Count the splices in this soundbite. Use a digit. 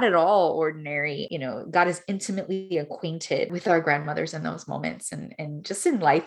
2